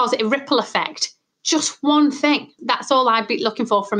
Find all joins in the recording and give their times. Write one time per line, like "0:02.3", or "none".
0:02.5